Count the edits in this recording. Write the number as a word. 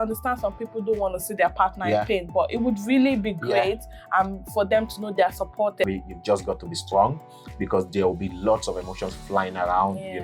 one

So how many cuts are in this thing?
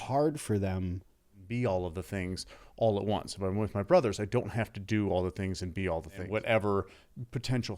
two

